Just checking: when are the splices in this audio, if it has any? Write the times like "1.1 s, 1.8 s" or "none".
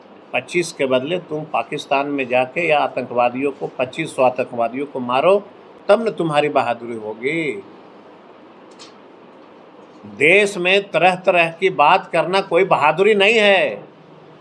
none